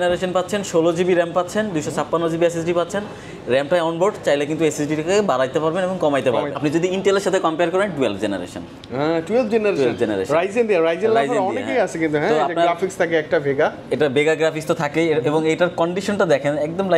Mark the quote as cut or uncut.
cut